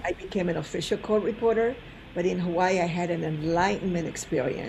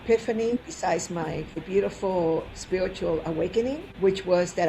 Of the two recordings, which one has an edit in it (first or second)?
second